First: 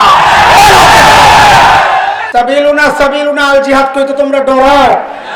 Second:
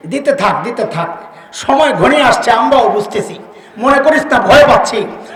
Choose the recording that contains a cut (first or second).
first